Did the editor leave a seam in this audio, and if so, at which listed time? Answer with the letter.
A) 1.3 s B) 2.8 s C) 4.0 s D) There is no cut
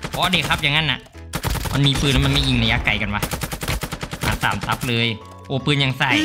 A